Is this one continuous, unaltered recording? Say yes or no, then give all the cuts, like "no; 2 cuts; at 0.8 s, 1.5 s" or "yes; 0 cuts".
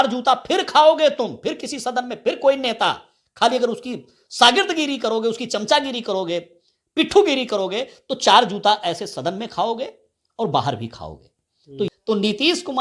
no; 1 cut; at 11.9 s